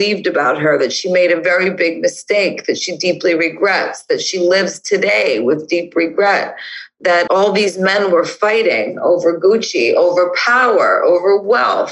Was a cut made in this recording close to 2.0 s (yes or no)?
no